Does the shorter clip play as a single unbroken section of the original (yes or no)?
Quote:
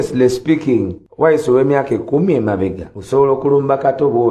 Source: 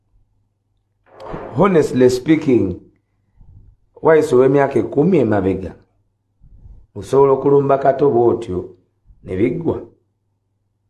no